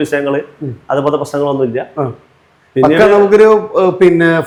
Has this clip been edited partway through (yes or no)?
no